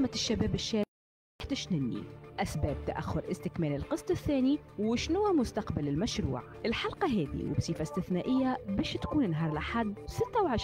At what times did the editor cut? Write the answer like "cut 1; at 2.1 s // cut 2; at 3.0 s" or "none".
cut 1; at 1.3 s